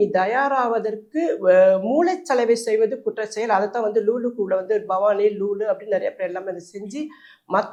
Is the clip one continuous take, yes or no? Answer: yes